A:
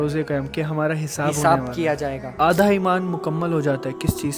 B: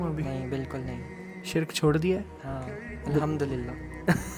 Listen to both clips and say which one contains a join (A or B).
A